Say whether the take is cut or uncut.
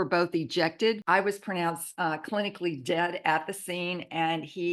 cut